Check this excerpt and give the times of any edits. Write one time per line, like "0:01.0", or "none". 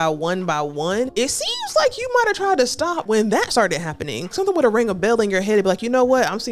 0:01.1
0:03.0
0:04.3